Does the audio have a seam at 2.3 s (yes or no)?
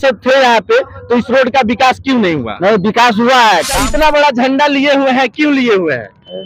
no